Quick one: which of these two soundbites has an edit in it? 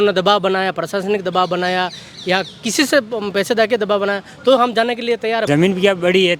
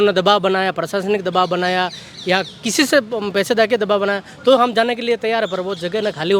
first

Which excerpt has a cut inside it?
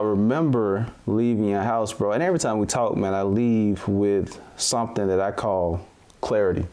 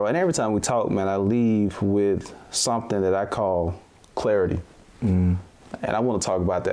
first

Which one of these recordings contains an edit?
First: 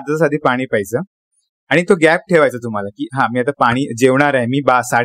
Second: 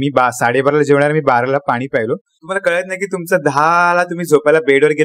second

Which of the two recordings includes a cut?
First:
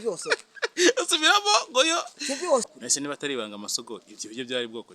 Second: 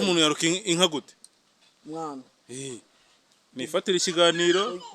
first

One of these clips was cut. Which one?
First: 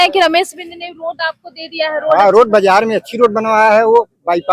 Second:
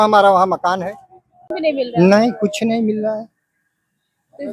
second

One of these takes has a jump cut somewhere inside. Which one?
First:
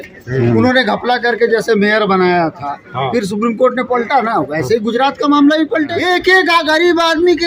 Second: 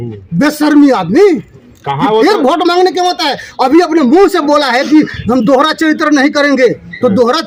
first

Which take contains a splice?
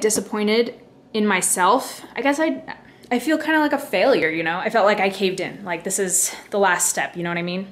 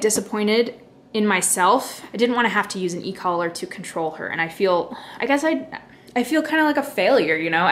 first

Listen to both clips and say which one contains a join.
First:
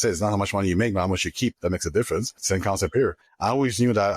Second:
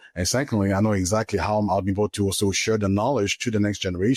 first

